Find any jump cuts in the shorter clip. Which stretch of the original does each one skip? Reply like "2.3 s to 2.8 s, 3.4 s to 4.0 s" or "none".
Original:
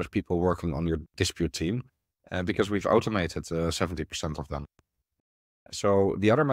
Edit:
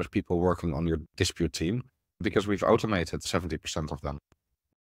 2.2 s to 2.4 s, 3.5 s to 3.7 s